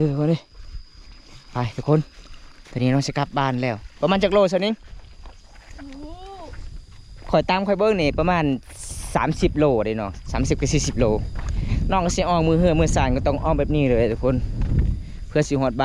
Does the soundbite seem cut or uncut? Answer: uncut